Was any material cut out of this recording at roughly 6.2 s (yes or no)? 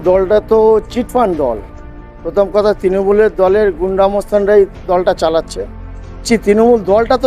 yes